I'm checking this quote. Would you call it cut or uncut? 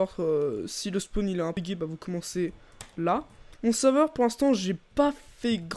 cut